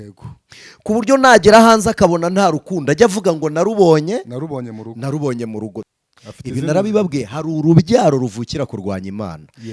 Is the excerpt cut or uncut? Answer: cut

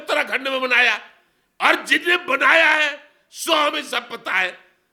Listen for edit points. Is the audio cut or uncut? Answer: uncut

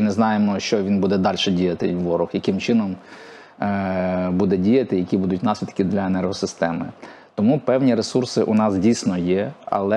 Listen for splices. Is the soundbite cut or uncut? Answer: uncut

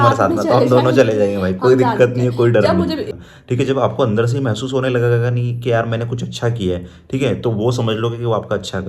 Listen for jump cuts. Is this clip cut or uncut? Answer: cut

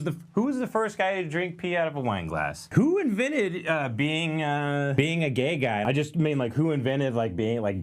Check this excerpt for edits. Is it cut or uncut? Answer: cut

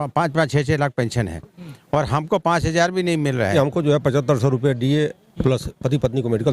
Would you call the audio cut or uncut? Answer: cut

